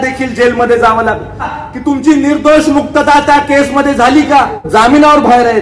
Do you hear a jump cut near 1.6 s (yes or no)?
yes